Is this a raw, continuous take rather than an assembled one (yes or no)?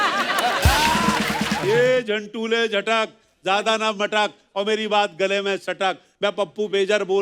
no